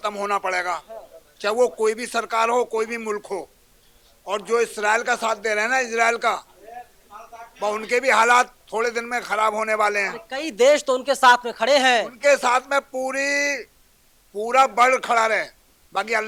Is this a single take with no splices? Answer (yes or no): yes